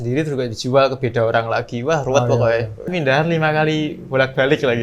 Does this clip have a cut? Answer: yes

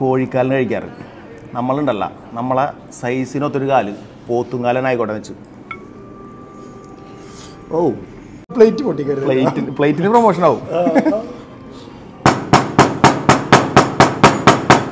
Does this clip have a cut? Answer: yes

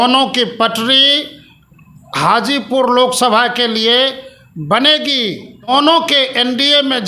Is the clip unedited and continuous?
no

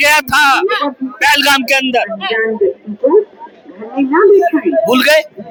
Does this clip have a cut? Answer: no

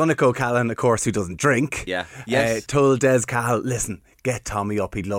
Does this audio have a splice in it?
yes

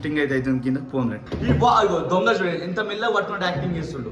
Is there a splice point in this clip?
yes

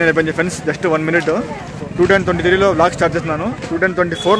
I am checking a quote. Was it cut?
yes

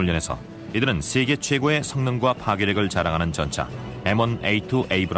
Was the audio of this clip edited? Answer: no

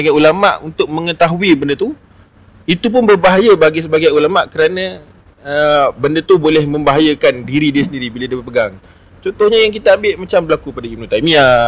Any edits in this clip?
no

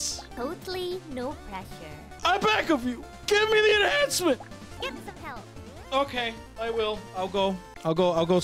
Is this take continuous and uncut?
yes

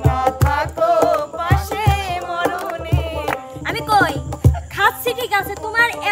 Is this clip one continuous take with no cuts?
no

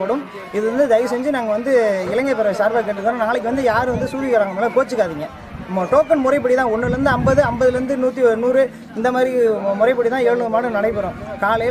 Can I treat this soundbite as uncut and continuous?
yes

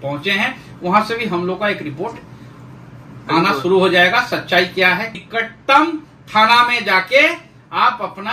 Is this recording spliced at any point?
yes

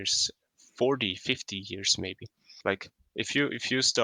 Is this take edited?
yes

